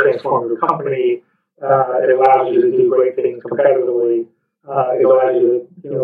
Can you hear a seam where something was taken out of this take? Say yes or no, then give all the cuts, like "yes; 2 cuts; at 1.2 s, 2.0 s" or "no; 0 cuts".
no; 0 cuts